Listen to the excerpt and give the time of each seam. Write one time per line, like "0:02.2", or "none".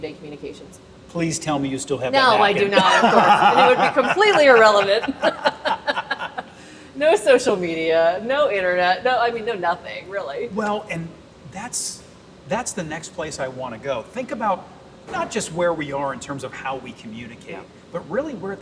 none